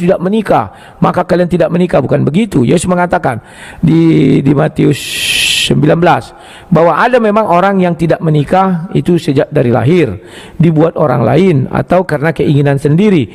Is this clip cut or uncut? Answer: uncut